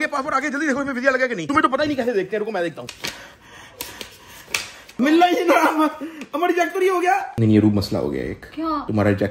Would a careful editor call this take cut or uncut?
cut